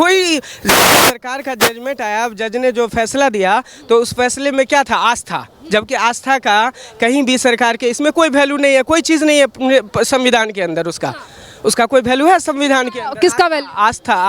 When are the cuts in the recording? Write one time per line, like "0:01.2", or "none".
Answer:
none